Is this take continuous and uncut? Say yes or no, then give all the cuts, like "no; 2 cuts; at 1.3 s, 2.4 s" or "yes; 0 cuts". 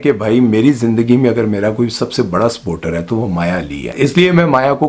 no; 1 cut; at 3.9 s